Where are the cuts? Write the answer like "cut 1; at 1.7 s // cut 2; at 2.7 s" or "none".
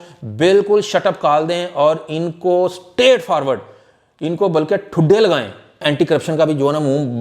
cut 1; at 5.8 s